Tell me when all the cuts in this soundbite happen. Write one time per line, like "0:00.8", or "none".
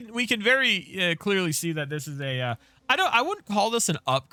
none